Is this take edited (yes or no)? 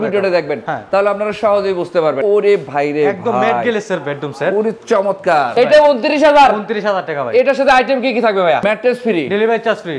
yes